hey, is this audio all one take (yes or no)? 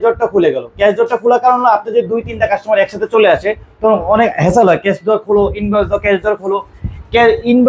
yes